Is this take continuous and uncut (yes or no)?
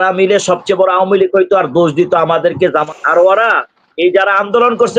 no